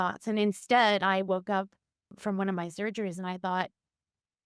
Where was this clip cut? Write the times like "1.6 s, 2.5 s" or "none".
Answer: 2.1 s